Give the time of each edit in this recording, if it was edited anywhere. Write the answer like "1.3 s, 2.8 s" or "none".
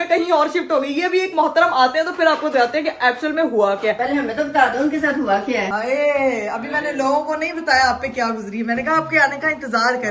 4.0 s, 5.7 s